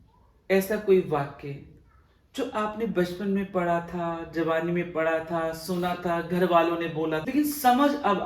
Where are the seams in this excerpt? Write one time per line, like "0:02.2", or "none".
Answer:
0:07.2